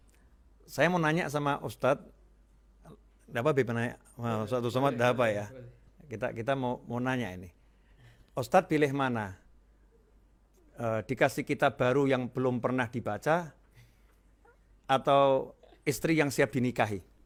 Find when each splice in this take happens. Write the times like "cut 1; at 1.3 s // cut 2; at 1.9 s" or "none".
none